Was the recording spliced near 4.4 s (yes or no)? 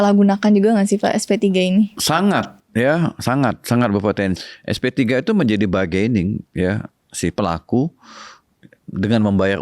yes